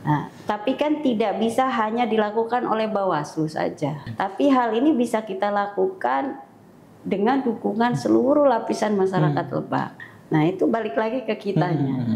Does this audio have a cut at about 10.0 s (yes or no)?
yes